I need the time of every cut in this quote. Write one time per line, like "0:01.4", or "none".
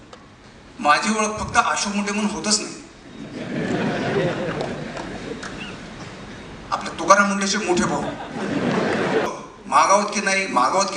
0:09.3

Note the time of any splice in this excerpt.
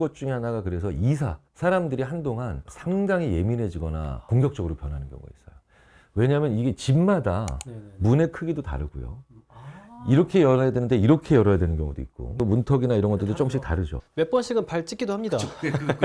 0:01.4
0:12.2

